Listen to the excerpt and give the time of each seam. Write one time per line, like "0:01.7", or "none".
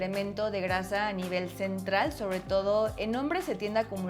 none